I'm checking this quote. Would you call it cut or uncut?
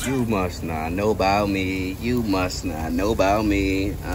uncut